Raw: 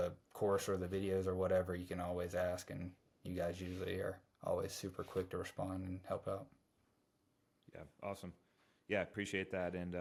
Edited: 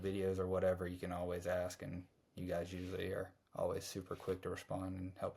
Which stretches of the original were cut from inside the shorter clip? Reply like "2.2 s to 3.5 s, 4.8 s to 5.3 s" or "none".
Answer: none